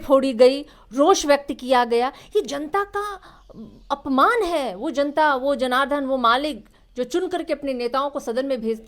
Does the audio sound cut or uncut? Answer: uncut